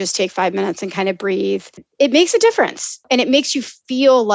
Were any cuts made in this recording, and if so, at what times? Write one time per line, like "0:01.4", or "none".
0:01.9
0:03.0